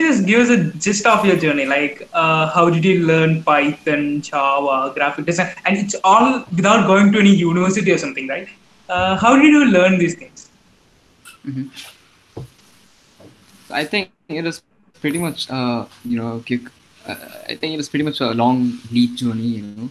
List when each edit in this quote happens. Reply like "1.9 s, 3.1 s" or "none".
none